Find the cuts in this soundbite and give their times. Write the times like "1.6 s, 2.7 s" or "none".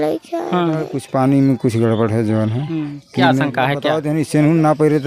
1.0 s, 3.9 s